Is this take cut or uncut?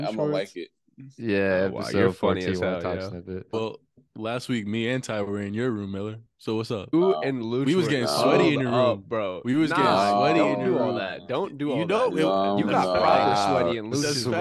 cut